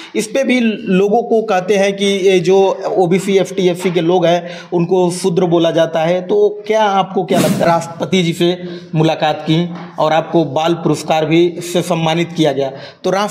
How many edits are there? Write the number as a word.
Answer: one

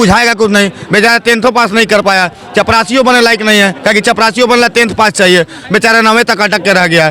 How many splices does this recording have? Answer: zero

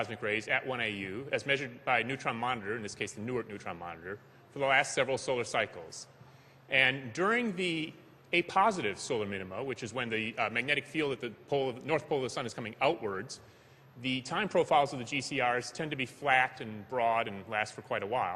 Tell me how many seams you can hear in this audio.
one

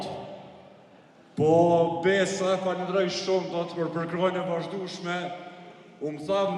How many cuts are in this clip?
zero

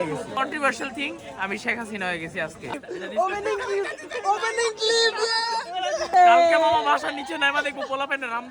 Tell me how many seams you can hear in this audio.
two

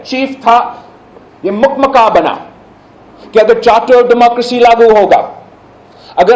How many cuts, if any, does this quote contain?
zero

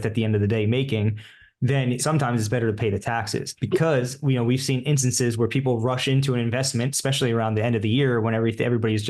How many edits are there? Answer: two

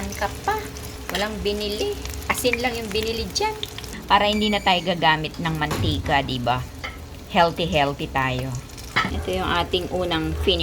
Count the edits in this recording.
four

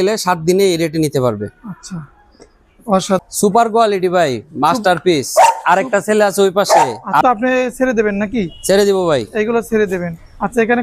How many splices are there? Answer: two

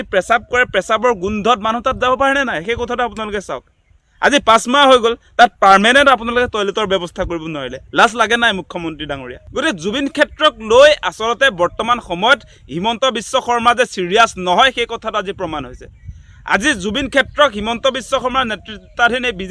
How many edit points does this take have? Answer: one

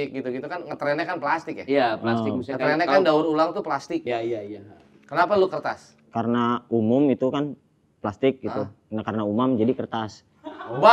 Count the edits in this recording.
one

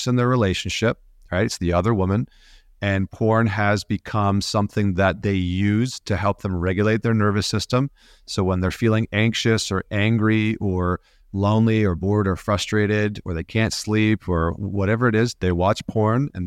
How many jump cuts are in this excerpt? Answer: zero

